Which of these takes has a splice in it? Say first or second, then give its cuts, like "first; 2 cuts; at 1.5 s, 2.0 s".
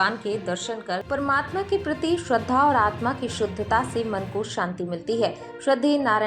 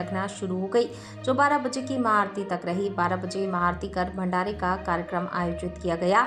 first; 1 cut; at 1.0 s